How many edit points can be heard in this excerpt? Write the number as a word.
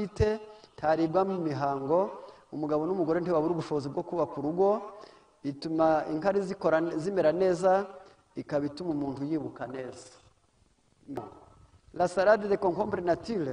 one